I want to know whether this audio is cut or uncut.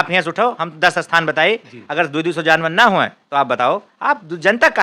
uncut